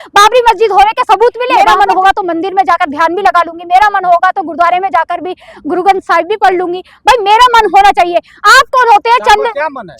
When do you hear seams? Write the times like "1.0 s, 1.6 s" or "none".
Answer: 1.6 s